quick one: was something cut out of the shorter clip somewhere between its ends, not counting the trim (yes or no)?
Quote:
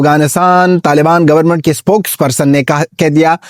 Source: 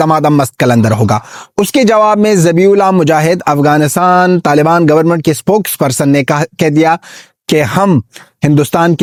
no